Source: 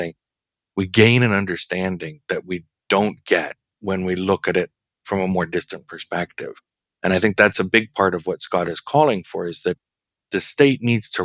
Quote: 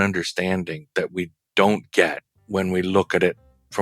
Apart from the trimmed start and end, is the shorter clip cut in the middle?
no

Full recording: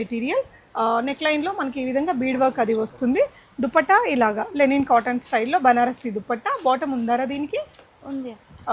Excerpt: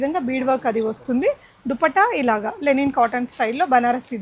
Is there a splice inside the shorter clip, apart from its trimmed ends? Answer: no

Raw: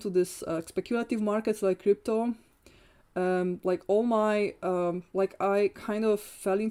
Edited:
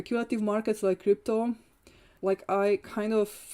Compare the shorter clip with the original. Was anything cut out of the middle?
yes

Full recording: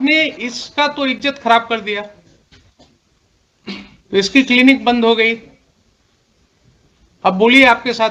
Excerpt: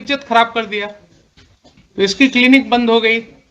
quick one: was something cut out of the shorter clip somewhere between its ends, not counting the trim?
yes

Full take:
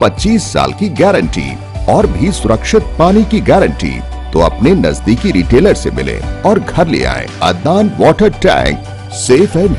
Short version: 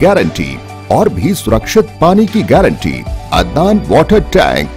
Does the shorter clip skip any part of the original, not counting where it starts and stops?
yes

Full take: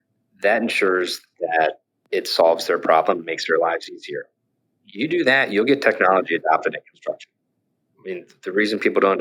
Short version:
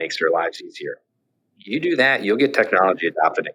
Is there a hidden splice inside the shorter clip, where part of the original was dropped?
no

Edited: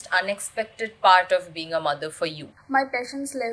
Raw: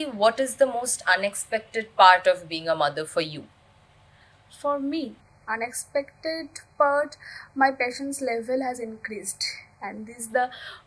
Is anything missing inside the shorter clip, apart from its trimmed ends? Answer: yes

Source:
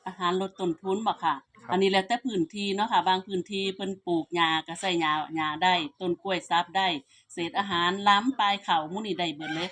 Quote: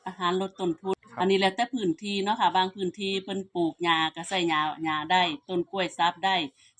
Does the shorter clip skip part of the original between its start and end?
yes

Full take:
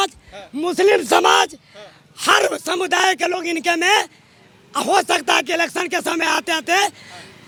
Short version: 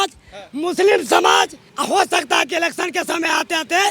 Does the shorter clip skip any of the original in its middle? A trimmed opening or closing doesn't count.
yes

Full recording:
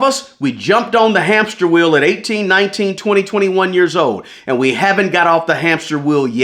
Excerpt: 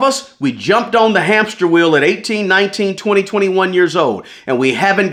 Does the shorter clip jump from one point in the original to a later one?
no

